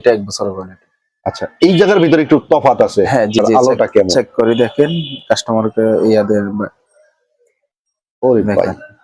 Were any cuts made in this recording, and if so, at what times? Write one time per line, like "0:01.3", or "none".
0:03.4

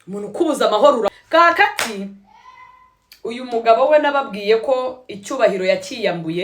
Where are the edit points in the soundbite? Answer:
0:01.2

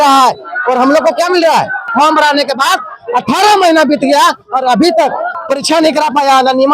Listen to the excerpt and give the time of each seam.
0:01.9
0:05.4

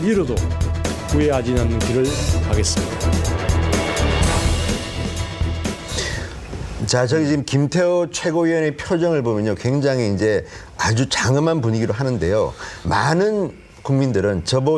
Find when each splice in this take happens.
none

